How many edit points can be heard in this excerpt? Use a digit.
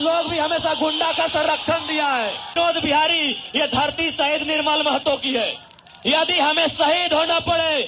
1